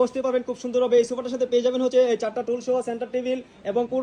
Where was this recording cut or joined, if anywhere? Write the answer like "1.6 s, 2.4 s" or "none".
none